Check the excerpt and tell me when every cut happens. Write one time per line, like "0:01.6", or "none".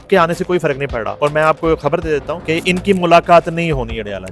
0:01.1
0:02.3